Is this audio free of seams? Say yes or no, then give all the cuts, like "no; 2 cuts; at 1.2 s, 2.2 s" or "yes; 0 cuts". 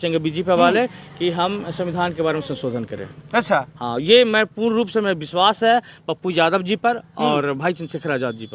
yes; 0 cuts